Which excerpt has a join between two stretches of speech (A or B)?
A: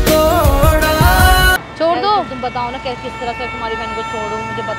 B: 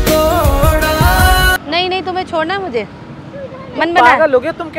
B